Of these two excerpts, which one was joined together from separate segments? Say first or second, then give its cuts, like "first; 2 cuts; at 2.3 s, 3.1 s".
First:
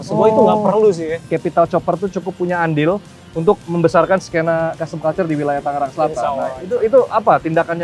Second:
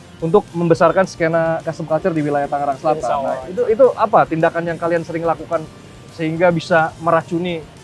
first; 1 cut; at 1.3 s